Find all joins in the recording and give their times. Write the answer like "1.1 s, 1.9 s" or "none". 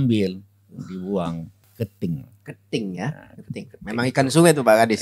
1.6 s